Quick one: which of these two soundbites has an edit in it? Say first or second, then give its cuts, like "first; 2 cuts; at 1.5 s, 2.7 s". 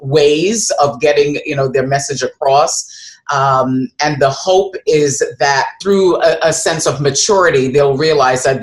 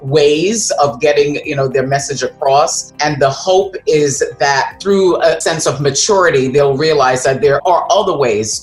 second; 3 cuts; at 2.9 s, 5.4 s, 7.6 s